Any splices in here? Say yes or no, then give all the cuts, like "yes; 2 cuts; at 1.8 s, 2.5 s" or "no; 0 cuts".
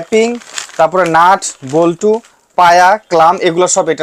no; 0 cuts